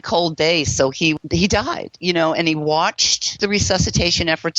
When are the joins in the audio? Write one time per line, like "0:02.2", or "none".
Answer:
0:01.2
0:03.3